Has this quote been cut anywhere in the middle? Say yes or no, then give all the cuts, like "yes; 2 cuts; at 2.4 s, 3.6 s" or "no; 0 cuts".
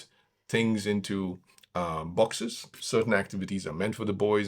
yes; 1 cut; at 2.8 s